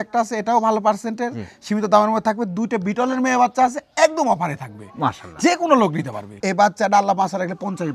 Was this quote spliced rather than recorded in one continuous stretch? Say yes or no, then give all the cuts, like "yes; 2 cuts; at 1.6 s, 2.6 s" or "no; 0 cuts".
yes; 1 cut; at 6.4 s